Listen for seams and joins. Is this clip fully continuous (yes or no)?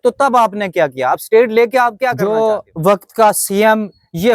no